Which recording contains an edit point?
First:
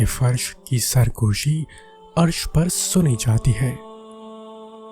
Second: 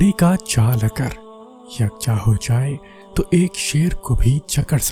first; 1 cut; at 3.8 s

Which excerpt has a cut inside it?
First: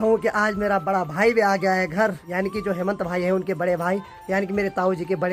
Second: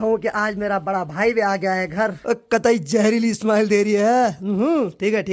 second; 1 cut; at 2.2 s

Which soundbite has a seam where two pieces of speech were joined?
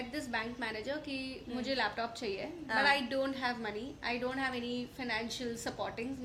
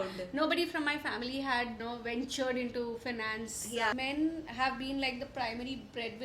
second; 2 cuts; at 1.8 s, 3.9 s

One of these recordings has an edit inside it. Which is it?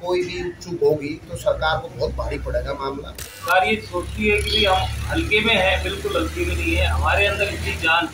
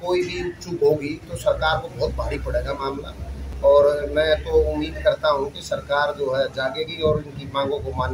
first; 1 cut; at 3.4 s

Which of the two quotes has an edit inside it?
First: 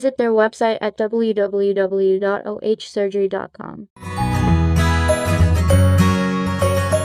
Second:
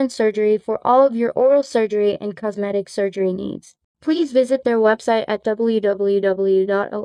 first; 1 cut; at 4.1 s

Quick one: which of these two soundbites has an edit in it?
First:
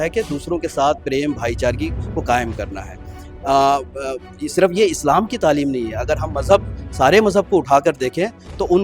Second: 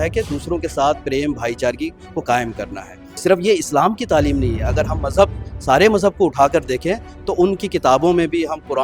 second; 1 cut; at 3.0 s

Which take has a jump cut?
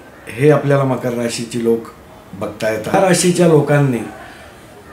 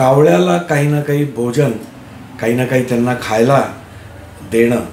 first; 1 cut; at 2.9 s

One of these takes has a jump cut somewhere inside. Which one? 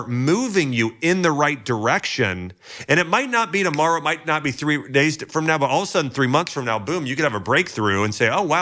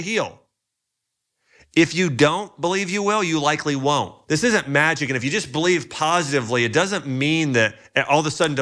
second; 1 cut; at 4.2 s

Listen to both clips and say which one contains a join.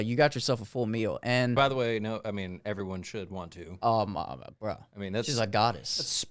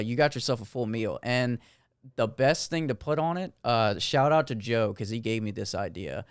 first; 1 cut; at 1.6 s

